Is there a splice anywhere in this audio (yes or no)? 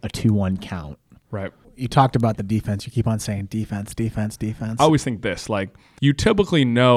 yes